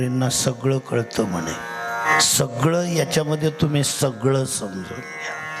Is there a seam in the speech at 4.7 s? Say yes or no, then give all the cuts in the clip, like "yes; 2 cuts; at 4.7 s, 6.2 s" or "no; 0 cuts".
no; 1 cut; at 2.1 s